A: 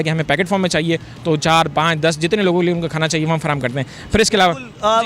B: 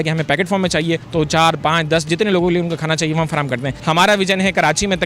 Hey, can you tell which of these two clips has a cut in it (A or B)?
B